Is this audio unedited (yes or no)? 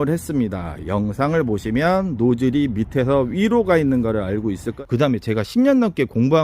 no